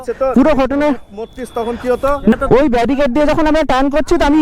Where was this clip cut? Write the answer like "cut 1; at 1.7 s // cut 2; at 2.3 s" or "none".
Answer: cut 1; at 2.3 s